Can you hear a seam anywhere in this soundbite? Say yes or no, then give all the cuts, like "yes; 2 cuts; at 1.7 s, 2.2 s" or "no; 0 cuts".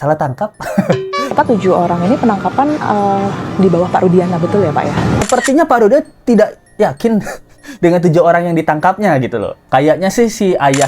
yes; 3 cuts; at 1.3 s, 5.2 s, 9.6 s